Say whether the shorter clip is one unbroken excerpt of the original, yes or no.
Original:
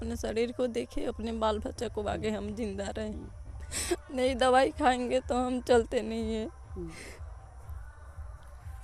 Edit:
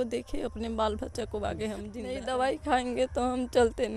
no